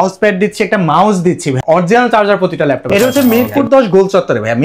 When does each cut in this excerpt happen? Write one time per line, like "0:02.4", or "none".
0:01.6
0:02.9